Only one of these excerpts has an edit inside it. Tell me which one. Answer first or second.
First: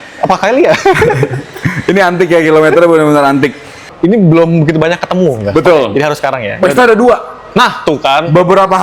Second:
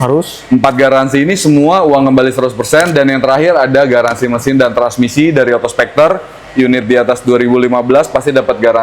first